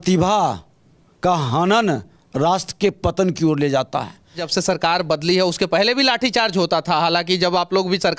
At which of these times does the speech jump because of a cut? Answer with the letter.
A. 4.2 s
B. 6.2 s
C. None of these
C